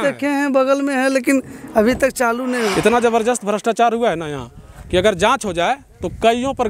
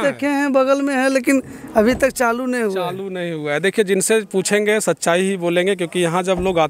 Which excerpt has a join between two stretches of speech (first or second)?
first